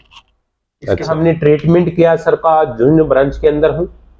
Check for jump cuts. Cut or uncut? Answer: cut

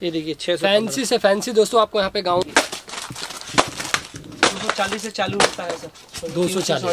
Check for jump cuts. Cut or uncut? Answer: cut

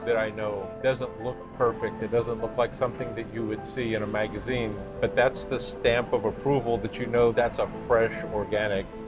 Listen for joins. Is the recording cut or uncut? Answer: uncut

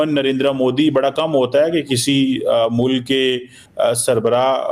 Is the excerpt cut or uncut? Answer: uncut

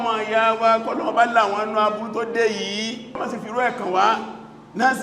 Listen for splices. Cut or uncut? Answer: cut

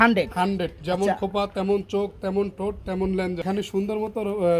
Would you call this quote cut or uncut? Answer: cut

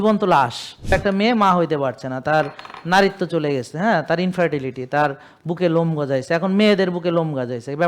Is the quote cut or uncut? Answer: cut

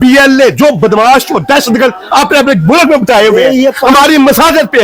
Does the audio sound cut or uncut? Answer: uncut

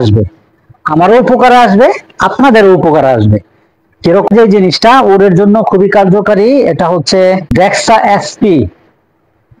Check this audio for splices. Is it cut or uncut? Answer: cut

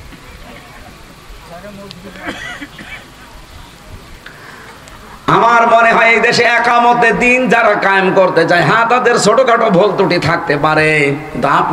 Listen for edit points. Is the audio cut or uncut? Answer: uncut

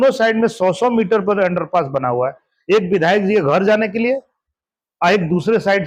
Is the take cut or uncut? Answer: uncut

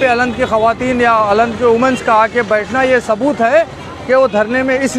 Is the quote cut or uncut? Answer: uncut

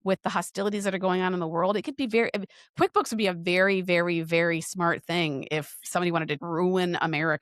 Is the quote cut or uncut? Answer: cut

